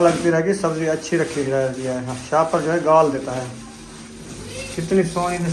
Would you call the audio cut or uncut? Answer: uncut